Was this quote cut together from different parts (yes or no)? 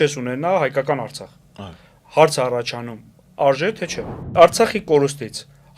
yes